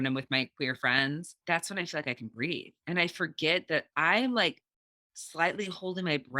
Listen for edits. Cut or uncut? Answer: cut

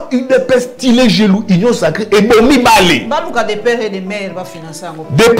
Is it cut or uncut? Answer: uncut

